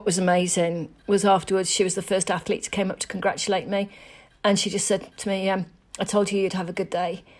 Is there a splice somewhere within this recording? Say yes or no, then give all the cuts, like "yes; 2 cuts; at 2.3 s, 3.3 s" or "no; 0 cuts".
yes; 1 cut; at 0.9 s